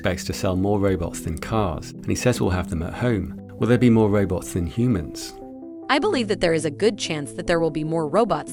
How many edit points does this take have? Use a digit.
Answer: 0